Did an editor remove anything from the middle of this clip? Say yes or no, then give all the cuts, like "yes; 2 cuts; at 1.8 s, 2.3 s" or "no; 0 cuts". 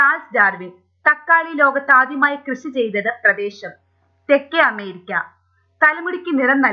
yes; 1 cut; at 1.2 s